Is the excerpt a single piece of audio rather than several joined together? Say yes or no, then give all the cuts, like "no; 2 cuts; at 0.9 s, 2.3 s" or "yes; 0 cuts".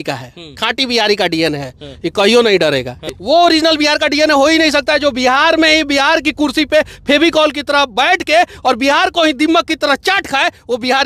no; 1 cut; at 3.0 s